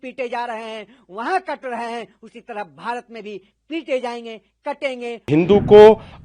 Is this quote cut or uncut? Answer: cut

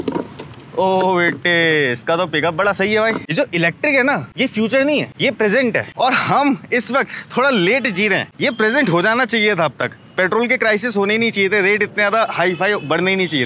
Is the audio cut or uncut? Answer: cut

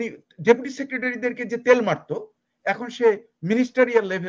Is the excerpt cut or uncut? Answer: uncut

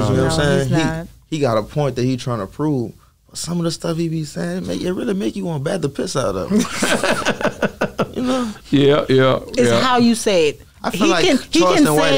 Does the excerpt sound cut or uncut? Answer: uncut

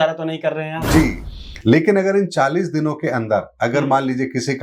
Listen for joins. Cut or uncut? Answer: cut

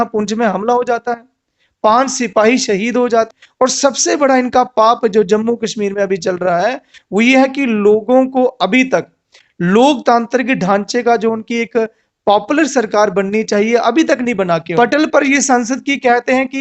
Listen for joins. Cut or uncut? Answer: cut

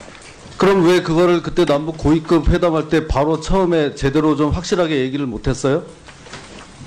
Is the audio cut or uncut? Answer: uncut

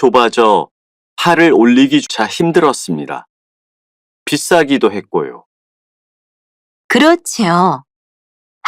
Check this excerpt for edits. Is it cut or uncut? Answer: cut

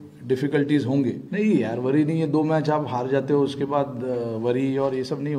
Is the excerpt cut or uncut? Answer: cut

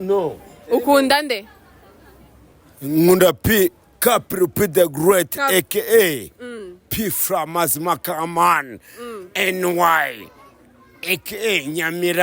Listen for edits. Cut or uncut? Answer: uncut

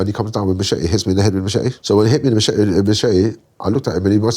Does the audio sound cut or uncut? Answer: cut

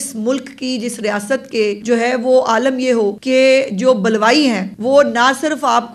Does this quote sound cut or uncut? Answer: cut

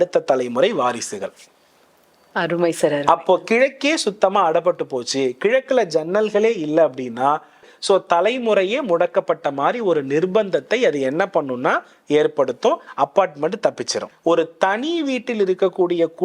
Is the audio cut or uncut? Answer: cut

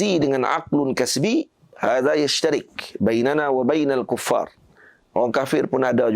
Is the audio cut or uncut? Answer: uncut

